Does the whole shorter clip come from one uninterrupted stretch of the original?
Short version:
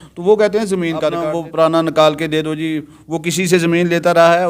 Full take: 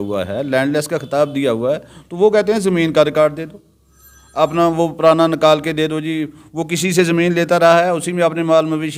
no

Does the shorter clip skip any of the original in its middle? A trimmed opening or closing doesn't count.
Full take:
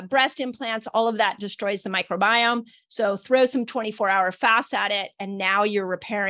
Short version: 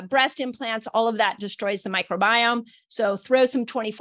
no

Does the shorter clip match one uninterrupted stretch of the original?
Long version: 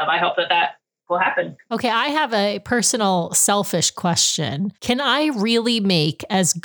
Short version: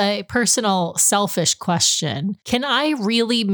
yes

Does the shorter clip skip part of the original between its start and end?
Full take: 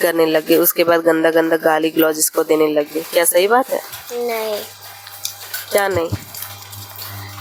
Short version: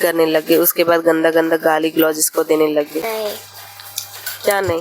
yes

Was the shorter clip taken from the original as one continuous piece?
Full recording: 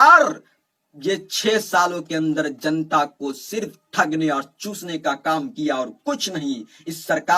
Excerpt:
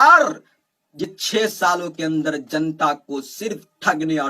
no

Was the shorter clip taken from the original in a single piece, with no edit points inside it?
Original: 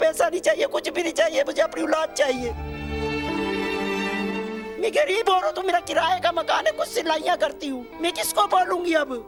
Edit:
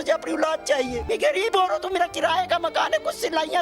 no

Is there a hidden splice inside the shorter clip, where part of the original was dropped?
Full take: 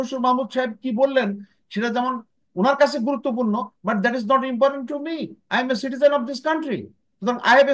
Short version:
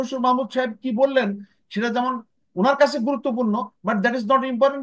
no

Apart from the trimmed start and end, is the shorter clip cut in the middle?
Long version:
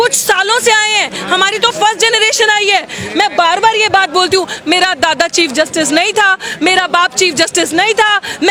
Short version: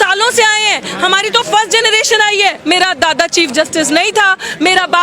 yes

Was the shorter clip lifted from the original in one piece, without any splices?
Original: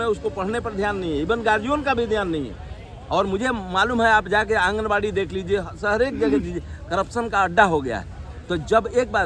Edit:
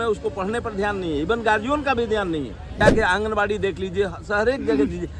no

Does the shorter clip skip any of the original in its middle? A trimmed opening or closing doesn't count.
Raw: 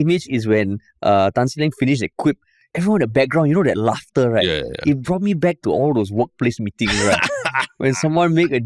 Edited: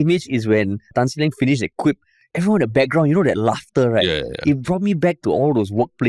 yes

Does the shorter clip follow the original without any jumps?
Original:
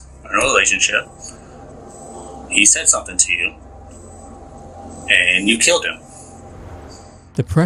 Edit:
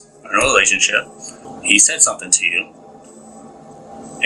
no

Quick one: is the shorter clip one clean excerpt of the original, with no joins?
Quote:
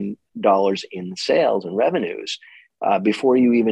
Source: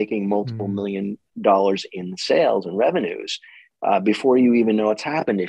yes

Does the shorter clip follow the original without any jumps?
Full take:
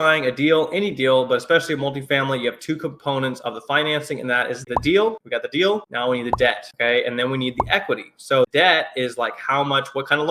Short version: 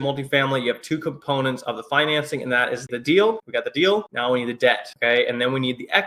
yes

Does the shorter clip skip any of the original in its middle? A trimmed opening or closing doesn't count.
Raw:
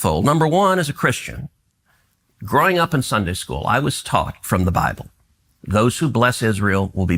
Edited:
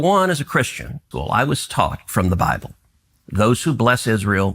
yes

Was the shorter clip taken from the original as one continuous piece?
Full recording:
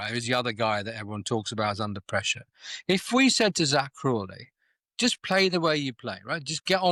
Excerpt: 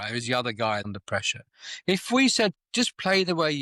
no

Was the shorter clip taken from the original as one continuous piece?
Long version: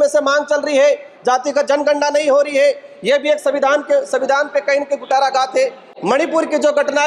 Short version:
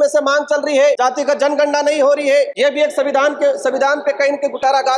no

